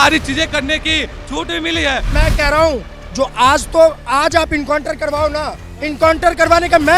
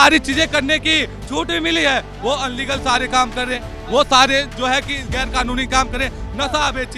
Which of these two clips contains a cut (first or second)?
first